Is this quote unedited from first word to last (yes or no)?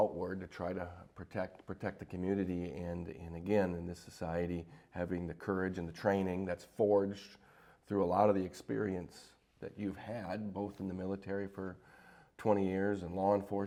yes